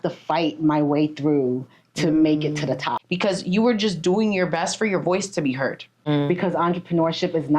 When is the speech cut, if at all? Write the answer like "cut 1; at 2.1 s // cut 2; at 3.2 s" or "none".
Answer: cut 1; at 3.0 s // cut 2; at 5.9 s